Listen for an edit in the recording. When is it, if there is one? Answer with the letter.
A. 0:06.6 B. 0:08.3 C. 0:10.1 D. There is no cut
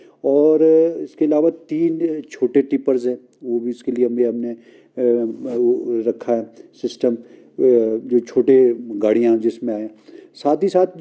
D